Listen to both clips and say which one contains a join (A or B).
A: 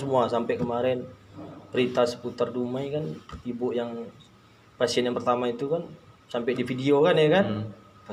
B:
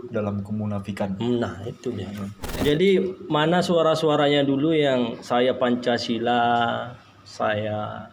B